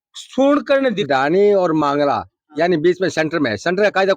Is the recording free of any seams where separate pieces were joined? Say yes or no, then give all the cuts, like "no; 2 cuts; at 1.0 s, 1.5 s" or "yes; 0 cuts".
no; 1 cut; at 1.1 s